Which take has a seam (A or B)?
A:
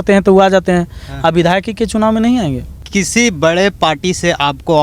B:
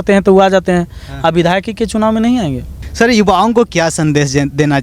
A